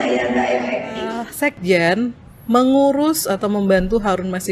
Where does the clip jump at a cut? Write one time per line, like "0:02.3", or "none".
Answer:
0:01.2

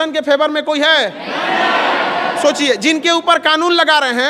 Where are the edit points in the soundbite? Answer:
none

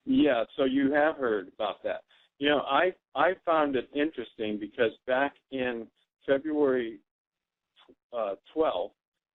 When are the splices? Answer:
none

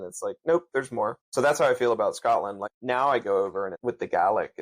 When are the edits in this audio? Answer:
0:01.2
0:02.7
0:03.8

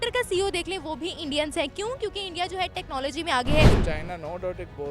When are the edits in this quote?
0:03.8

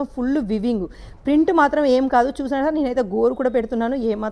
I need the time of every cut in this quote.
none

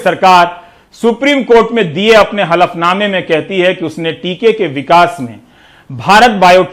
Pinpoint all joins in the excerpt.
none

